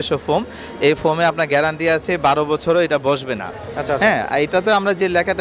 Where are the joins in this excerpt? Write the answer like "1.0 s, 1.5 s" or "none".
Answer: none